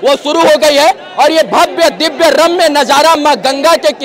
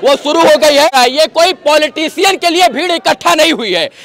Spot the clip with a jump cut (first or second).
second